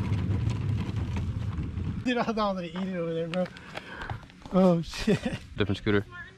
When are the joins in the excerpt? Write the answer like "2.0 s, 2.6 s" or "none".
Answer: 2.0 s, 5.6 s